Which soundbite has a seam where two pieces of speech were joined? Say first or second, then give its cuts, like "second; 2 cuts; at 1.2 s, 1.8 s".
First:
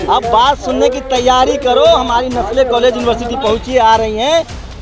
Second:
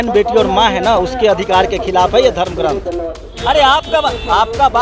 second; 1 cut; at 3.3 s